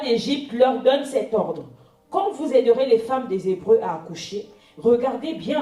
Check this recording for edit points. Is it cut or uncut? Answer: uncut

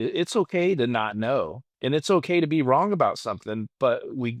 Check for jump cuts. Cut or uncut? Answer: cut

